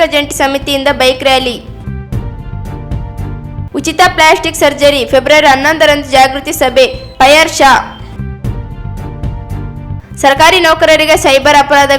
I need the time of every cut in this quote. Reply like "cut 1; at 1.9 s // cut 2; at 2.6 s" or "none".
cut 1; at 8.0 s // cut 2; at 10.0 s